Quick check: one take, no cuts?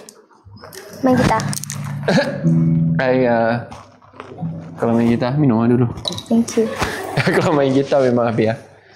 yes; 0 cuts

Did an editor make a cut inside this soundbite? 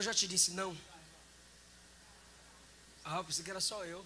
no; 0 cuts

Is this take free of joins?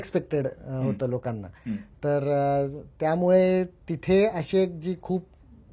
yes; 0 cuts

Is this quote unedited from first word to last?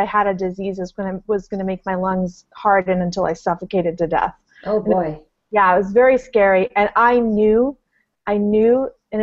yes; 0 cuts

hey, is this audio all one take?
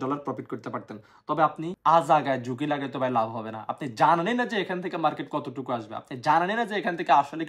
no; 1 cut; at 1.7 s

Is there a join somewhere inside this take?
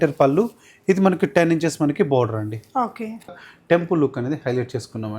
yes; 1 cut; at 3.3 s

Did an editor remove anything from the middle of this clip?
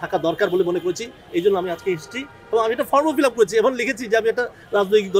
no; 0 cuts

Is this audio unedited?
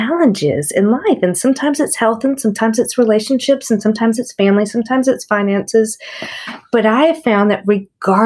yes; 0 cuts

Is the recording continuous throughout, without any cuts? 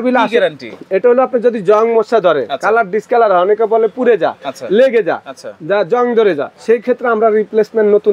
no; 1 cut; at 6.5 s

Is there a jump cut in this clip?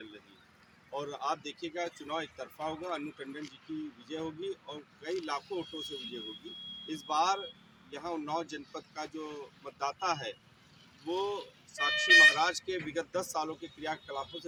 no; 0 cuts

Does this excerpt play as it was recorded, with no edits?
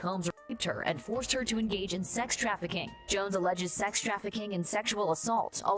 no; 1 cut; at 2.9 s

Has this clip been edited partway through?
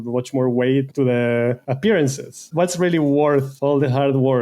yes; 4 cuts; at 0.9 s, 1.7 s, 2.4 s, 3.5 s

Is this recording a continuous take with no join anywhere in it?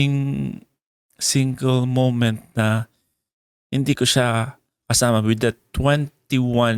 yes; 0 cuts

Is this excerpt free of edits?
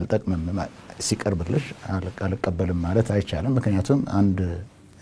yes; 0 cuts

